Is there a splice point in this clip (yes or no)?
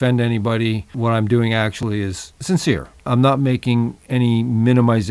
yes